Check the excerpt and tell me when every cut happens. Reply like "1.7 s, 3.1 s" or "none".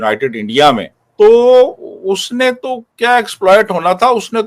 1.0 s